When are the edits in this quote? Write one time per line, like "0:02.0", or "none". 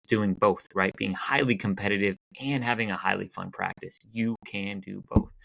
none